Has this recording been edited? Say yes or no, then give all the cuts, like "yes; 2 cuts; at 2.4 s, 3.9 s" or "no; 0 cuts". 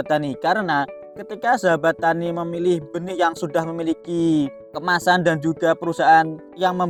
no; 0 cuts